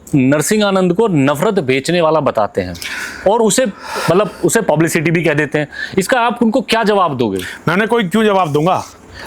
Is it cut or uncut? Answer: uncut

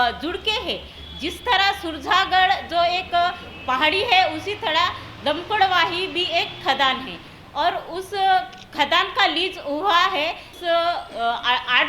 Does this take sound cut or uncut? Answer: cut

